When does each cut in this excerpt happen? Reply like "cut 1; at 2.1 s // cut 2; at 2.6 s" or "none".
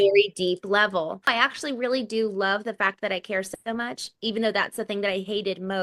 cut 1; at 1.3 s